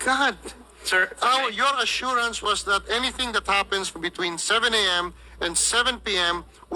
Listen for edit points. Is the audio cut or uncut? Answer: uncut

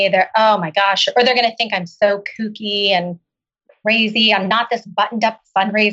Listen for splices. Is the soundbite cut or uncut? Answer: cut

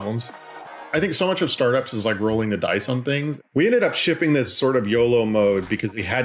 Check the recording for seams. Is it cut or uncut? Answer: cut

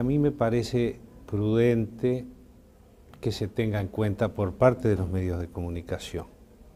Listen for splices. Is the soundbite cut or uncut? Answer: uncut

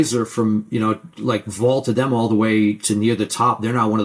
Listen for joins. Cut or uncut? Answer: uncut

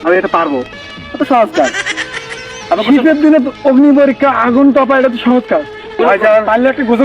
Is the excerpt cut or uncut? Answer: cut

